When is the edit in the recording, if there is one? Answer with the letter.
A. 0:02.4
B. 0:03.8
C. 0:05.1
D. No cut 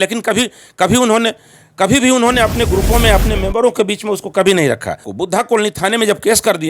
C